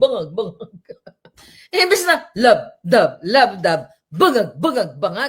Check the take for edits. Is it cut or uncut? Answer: uncut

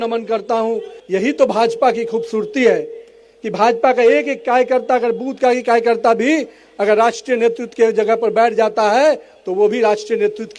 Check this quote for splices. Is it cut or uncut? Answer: cut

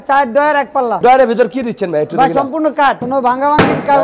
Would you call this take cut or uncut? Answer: cut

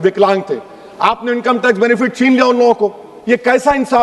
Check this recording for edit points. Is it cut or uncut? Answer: uncut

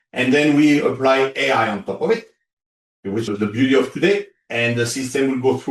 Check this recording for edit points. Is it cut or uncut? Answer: cut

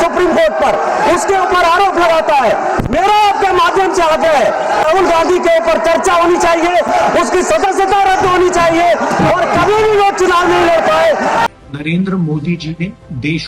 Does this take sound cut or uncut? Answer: cut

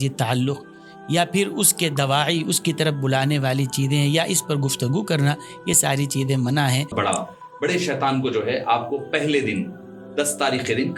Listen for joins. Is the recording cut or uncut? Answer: cut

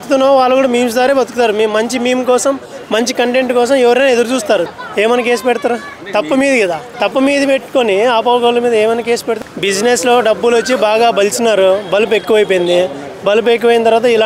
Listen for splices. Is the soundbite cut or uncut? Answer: cut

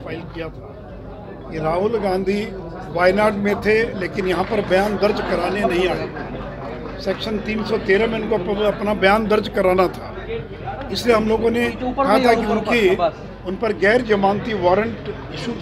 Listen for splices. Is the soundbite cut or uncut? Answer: uncut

